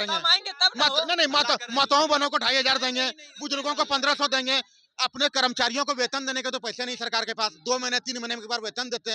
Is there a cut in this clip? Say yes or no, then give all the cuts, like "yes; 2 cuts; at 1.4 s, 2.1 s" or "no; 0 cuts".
no; 0 cuts